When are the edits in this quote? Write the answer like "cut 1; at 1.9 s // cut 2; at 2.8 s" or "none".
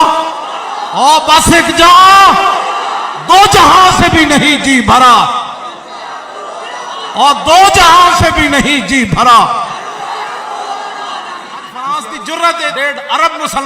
cut 1; at 11.7 s